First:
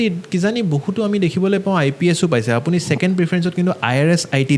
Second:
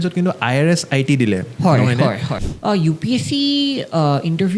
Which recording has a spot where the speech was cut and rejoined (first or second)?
second